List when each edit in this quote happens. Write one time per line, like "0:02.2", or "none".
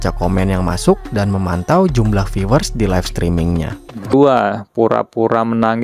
0:04.1